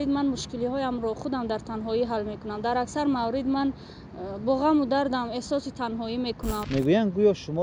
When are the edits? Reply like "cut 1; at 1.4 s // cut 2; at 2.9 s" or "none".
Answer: cut 1; at 6.6 s